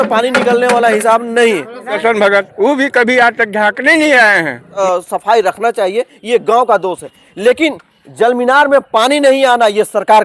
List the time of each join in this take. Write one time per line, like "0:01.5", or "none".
0:01.9
0:04.7